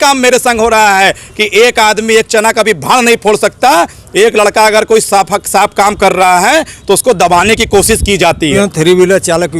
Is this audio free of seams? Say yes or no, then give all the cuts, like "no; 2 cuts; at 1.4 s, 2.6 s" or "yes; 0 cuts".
no; 1 cut; at 8.6 s